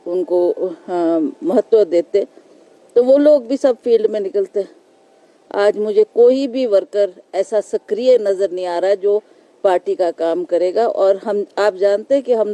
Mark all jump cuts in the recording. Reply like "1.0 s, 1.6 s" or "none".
none